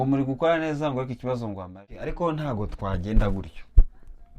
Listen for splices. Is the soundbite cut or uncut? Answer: cut